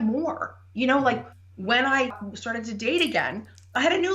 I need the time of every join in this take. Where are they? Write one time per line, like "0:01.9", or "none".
0:02.3